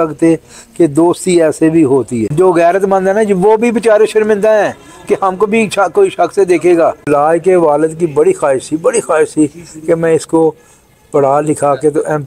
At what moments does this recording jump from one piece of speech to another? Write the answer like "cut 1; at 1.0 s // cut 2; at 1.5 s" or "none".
cut 1; at 2.2 s // cut 2; at 7.0 s